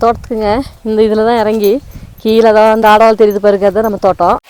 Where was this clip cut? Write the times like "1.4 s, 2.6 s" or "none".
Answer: none